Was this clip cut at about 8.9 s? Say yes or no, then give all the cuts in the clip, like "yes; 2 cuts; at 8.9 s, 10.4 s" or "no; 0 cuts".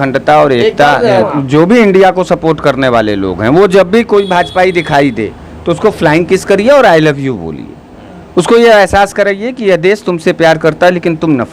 no; 1 cut; at 1.3 s